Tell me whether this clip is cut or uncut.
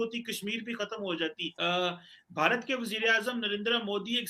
cut